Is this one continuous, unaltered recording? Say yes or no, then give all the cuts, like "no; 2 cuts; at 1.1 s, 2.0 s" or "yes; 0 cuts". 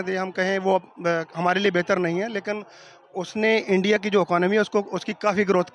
yes; 0 cuts